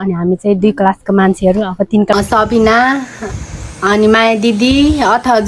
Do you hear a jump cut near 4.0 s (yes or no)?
no